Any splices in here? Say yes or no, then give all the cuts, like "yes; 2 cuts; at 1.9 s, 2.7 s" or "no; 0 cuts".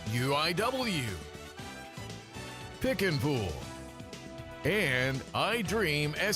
yes; 1 cut; at 1.1 s